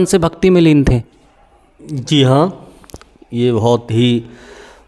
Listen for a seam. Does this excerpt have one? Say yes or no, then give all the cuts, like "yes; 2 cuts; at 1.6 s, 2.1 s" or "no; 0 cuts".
no; 0 cuts